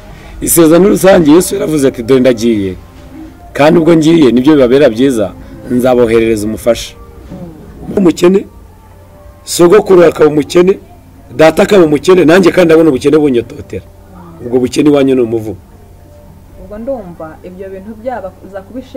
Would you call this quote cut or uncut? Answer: cut